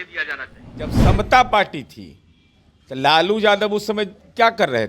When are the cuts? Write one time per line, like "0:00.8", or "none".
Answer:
0:01.0